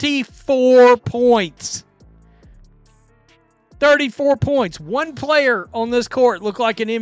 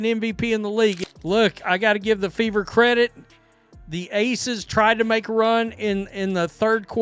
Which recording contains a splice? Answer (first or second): second